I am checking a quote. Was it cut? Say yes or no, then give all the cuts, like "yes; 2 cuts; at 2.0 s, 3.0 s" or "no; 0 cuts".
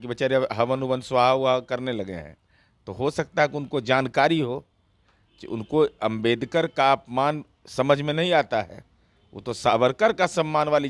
no; 0 cuts